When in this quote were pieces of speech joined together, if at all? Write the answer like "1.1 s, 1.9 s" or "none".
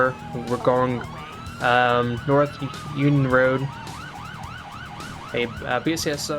none